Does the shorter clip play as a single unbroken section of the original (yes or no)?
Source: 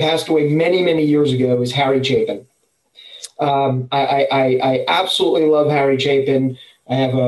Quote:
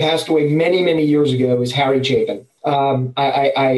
no